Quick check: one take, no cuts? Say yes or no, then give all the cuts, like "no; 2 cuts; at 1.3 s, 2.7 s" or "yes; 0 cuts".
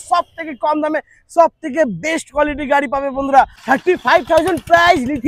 no; 1 cut; at 3.6 s